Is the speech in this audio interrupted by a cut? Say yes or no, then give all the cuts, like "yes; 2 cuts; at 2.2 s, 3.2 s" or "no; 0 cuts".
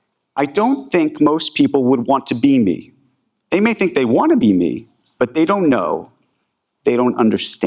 no; 0 cuts